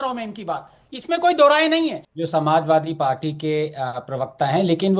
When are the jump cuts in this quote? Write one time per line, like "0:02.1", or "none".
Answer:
0:02.1